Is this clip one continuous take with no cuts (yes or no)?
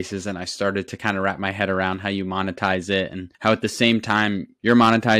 yes